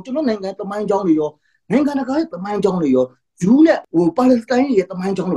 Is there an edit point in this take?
yes; 1 cut; at 3.8 s

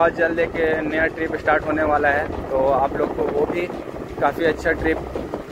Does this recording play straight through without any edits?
yes; 0 cuts

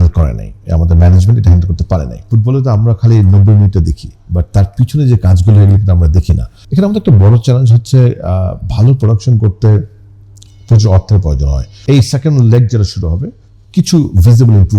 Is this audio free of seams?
no; 3 cuts; at 2.3 s, 6.5 s, 11.6 s

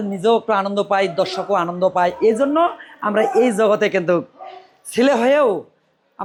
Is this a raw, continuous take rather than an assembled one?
yes; 0 cuts

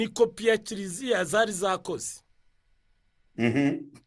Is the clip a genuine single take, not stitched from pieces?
yes; 0 cuts

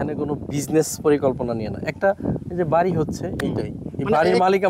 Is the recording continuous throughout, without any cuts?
yes; 0 cuts

